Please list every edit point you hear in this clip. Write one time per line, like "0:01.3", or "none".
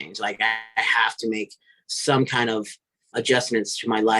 0:03.0